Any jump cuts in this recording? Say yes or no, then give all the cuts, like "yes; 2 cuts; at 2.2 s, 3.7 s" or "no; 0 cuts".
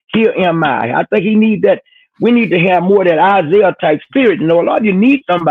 no; 0 cuts